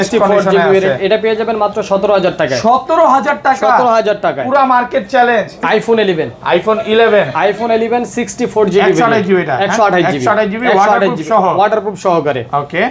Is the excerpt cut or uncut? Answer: cut